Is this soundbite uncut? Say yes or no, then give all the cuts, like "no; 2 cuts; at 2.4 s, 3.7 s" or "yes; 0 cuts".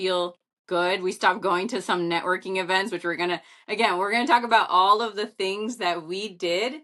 yes; 0 cuts